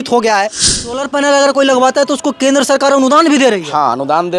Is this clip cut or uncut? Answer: cut